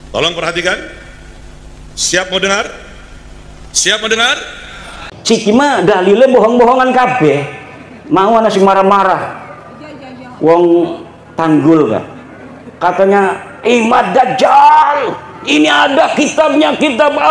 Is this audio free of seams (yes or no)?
no